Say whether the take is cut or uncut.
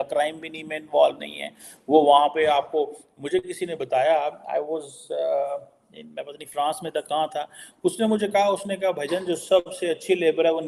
uncut